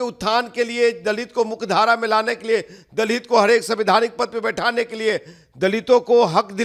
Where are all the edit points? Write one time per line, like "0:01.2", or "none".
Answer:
none